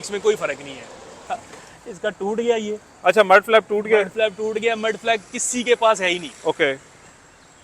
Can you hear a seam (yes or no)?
yes